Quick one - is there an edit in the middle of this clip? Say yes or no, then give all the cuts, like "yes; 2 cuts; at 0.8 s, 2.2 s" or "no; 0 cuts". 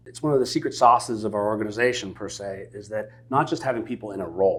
no; 0 cuts